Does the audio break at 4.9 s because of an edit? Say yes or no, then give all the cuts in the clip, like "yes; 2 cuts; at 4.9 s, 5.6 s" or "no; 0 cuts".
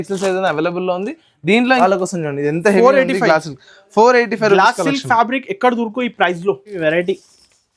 no; 2 cuts; at 1.8 s, 6.8 s